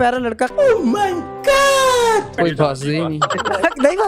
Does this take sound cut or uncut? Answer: cut